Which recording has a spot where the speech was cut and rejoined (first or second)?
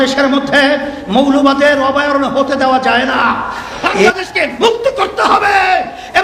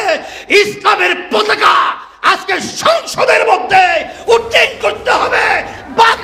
first